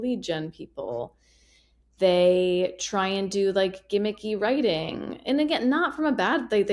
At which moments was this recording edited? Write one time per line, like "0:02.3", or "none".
none